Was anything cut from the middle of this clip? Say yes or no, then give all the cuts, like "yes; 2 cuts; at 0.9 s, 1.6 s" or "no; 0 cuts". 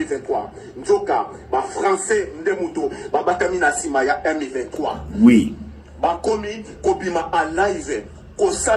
no; 0 cuts